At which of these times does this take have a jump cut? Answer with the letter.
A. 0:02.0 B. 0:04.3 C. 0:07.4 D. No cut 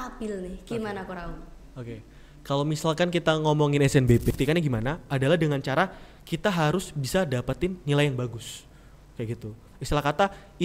B